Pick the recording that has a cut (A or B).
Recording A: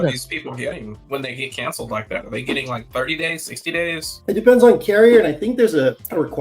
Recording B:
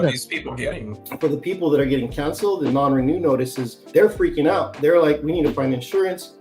B